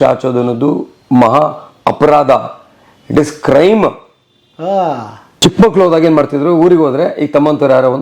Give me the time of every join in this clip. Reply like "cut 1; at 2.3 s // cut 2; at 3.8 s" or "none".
cut 1; at 5.2 s